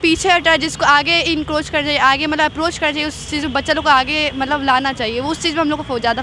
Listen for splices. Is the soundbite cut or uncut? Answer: uncut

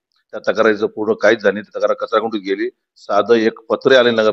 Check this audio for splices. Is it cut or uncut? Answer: uncut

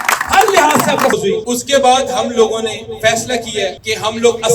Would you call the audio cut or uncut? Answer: cut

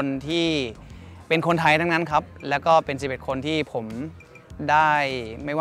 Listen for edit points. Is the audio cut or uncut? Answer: uncut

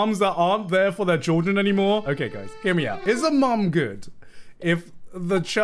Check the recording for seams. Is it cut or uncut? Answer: cut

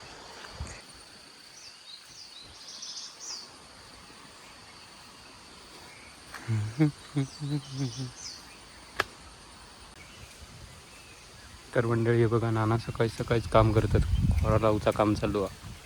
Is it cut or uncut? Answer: cut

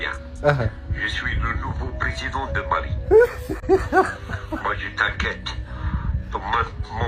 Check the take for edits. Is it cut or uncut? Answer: uncut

